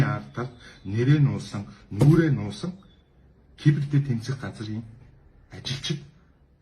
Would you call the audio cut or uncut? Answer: uncut